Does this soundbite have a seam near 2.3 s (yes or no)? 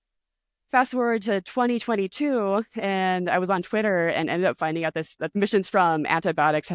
no